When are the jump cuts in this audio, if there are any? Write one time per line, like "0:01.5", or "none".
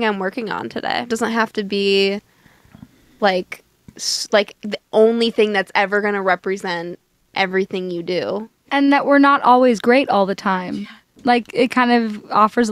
0:01.1
0:08.5